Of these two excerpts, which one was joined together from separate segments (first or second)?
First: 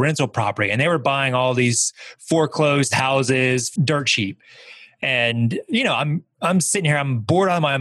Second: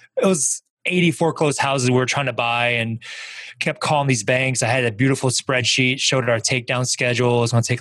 first